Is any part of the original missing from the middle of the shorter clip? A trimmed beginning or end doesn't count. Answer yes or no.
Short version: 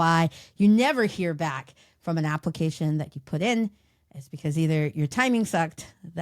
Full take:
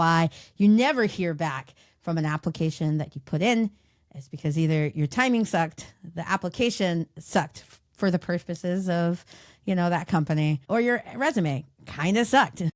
no